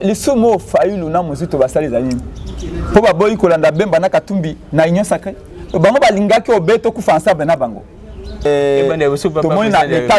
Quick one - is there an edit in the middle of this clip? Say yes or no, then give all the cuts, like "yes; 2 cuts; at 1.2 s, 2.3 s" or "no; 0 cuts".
yes; 1 cut; at 8.4 s